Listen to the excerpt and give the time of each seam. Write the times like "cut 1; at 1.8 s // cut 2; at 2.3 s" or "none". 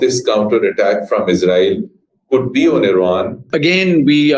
cut 1; at 3.4 s